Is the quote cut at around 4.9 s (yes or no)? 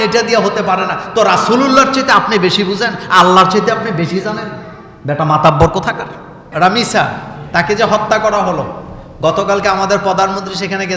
no